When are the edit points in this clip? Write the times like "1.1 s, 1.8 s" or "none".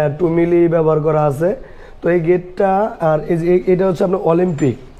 none